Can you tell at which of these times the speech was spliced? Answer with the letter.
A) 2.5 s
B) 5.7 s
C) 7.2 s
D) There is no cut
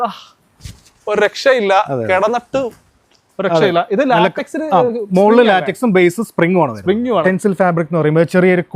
C